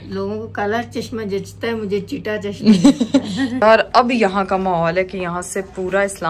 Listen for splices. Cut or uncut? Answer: cut